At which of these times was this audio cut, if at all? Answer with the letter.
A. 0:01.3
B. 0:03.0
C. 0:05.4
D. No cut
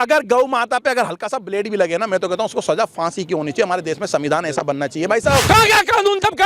C